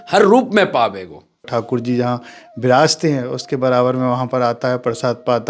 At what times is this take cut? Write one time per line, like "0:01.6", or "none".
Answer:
0:01.5